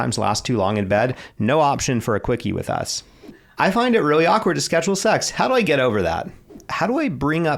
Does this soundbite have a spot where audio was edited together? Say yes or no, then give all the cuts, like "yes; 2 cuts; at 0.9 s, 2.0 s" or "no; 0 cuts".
yes; 2 cuts; at 3.4 s, 6.6 s